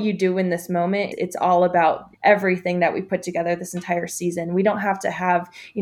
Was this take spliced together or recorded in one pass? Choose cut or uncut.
cut